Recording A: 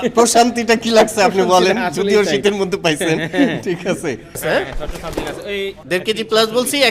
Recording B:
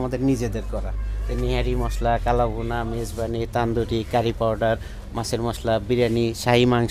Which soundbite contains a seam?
A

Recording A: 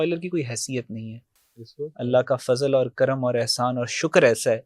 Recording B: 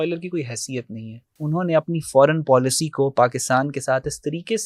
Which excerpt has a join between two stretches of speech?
B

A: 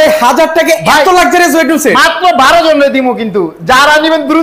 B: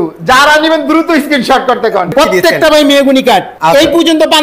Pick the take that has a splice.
B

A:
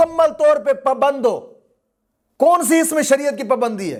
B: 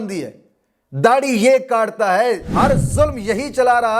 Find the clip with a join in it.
B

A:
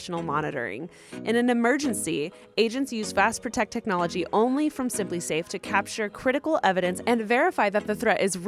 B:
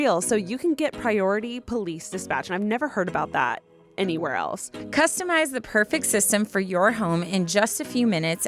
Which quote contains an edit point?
B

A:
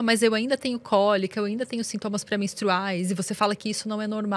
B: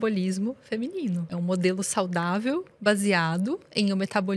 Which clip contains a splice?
B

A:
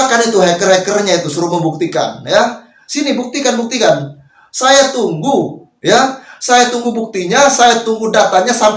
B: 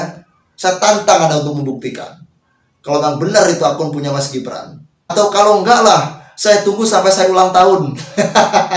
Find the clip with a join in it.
B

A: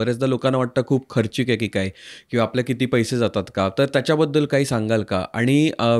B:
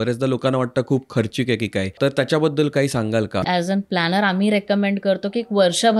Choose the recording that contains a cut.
B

